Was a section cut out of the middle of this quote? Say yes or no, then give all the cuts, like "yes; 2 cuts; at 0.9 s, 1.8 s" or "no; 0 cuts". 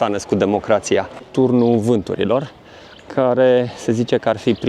yes; 1 cut; at 1.2 s